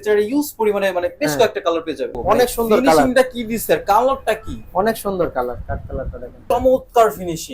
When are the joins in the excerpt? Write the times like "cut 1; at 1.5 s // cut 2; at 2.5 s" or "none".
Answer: cut 1; at 2.2 s // cut 2; at 6.3 s